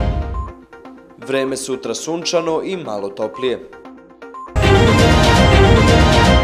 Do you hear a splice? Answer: yes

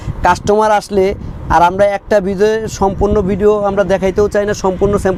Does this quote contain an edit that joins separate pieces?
no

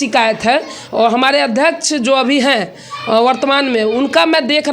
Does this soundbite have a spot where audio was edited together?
no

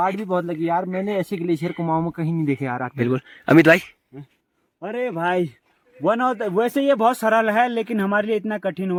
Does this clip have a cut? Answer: no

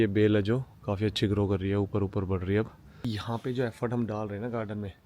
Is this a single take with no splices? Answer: no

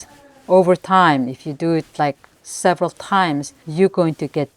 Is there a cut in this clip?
yes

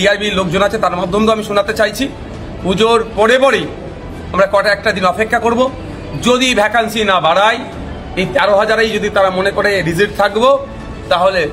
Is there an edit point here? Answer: no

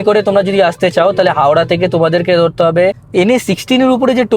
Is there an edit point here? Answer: yes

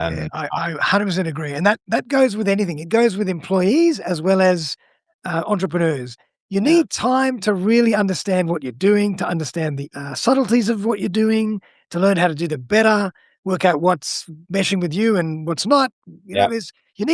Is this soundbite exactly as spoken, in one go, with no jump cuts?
no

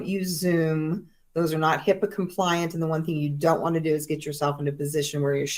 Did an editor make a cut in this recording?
no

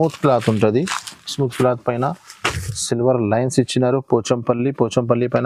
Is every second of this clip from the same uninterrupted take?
yes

